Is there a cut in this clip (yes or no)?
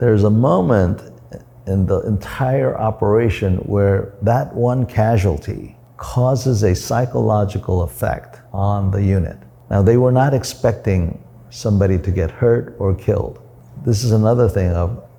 no